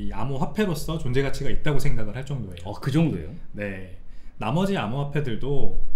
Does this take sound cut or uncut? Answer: uncut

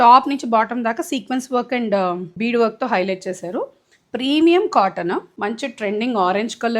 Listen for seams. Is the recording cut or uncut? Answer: cut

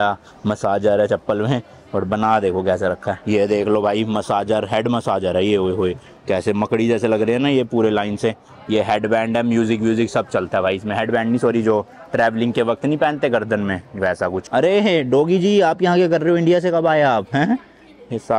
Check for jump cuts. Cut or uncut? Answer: uncut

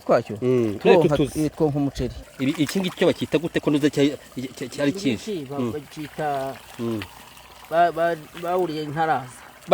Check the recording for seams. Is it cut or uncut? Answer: cut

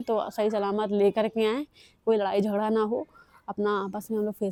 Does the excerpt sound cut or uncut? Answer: uncut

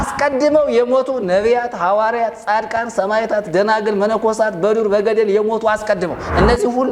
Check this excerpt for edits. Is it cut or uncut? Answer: uncut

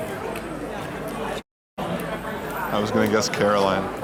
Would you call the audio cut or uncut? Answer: uncut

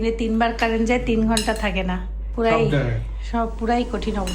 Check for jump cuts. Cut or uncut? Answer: cut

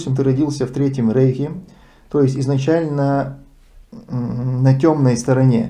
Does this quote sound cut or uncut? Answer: uncut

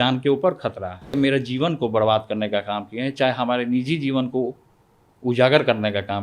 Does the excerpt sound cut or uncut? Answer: cut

